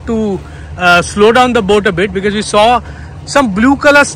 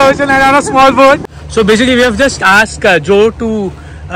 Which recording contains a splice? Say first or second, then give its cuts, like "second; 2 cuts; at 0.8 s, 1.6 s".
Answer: second; 1 cut; at 1.3 s